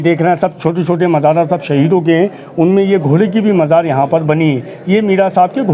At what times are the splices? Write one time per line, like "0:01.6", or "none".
none